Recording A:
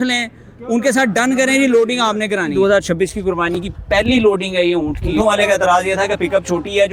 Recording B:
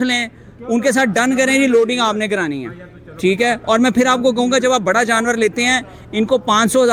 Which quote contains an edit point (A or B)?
A